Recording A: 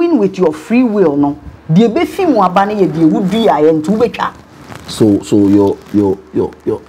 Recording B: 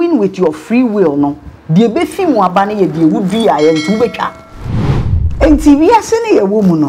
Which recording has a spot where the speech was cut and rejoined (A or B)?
B